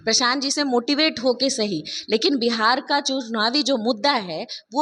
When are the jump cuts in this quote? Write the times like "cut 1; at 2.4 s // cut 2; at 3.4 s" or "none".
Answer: none